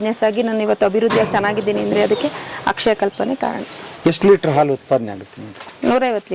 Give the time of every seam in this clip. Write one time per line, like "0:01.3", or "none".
0:03.8